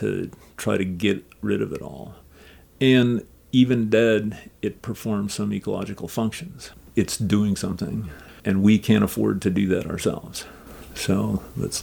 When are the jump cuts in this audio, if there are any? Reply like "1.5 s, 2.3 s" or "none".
6.9 s, 8.4 s